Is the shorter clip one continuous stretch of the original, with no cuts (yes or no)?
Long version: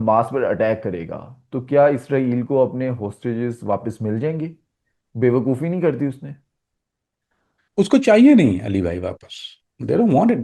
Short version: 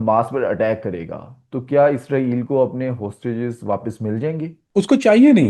no